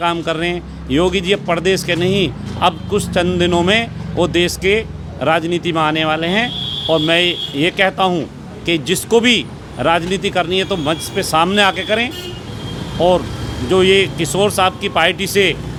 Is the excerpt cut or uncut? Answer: uncut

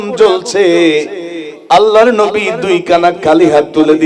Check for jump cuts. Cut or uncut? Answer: uncut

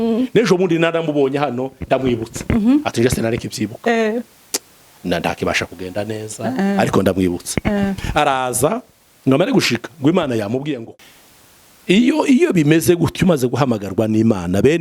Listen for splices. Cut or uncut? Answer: cut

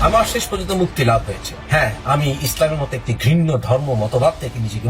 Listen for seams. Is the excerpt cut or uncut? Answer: uncut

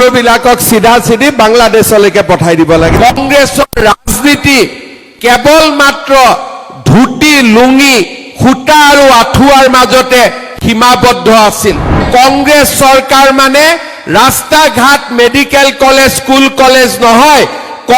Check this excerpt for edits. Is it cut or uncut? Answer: cut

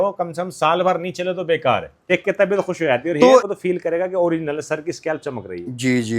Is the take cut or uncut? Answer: cut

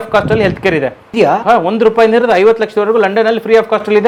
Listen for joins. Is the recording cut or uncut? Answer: uncut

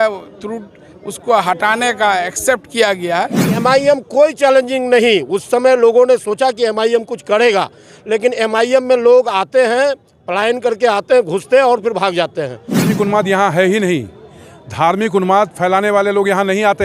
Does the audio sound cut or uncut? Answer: cut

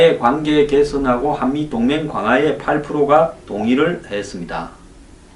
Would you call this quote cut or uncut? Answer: uncut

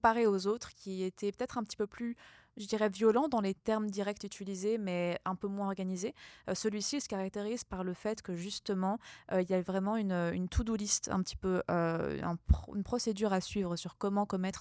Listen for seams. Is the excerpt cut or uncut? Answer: uncut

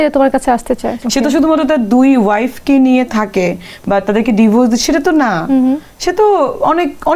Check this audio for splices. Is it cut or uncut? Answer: cut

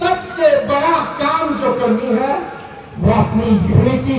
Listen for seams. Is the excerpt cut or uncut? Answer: uncut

